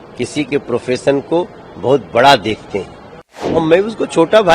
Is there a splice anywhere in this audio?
yes; 1 cut; at 3.6 s

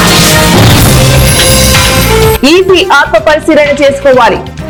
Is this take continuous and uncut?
yes; 0 cuts

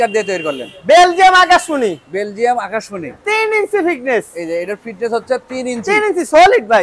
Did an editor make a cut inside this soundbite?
no; 0 cuts

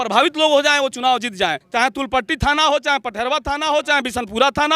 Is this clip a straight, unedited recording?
no; 1 cut; at 1.6 s

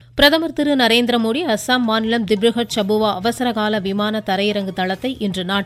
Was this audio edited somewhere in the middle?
no; 0 cuts

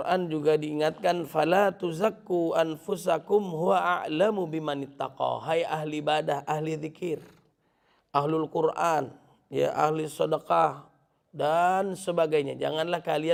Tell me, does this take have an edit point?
no; 0 cuts

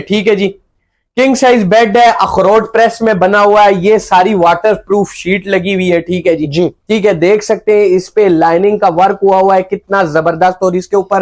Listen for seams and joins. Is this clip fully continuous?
yes; 0 cuts

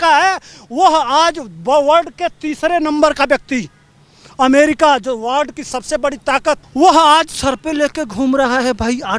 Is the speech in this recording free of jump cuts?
no; 1 cut; at 6.7 s

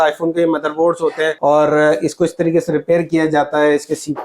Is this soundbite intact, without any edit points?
no; 1 cut; at 1.4 s

